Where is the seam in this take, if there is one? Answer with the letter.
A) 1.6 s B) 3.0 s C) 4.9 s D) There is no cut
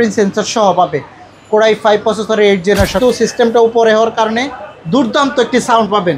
B